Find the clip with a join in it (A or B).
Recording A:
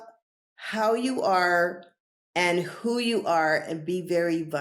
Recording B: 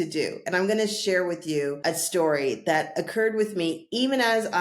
B